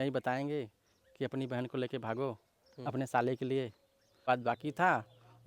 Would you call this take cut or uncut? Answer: cut